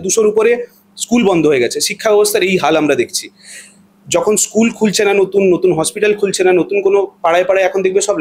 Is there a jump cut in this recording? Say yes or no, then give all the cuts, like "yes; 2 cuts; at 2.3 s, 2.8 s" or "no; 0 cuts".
no; 0 cuts